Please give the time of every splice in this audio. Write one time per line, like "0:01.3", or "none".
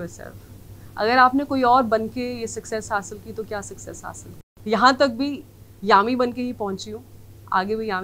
0:04.5